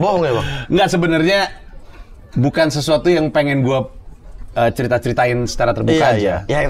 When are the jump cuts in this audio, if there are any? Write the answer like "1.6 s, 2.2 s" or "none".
none